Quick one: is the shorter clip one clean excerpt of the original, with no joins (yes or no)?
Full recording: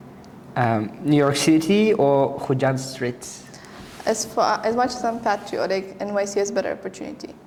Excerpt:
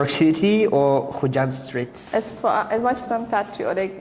no